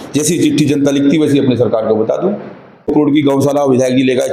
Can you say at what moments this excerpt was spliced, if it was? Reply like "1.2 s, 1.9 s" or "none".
2.9 s